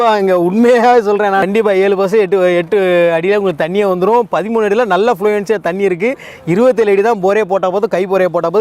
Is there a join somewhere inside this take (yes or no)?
yes